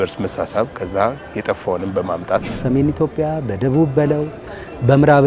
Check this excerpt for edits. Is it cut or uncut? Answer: cut